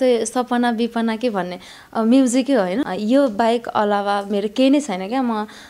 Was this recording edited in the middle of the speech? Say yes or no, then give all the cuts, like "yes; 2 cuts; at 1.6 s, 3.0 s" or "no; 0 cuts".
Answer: yes; 1 cut; at 2.8 s